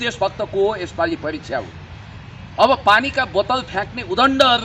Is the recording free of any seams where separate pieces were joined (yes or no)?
yes